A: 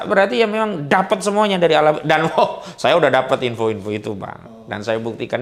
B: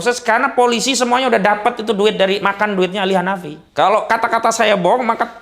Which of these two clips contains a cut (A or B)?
B